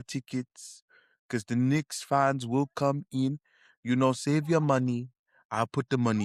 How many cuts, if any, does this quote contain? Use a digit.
0